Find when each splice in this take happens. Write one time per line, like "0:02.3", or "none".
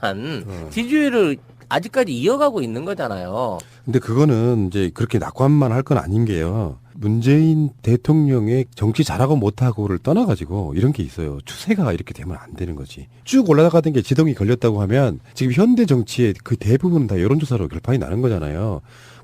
0:12.4